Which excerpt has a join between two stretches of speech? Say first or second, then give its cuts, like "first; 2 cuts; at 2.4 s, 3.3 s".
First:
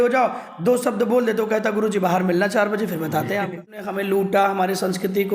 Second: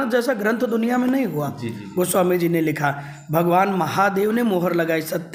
first; 1 cut; at 3.8 s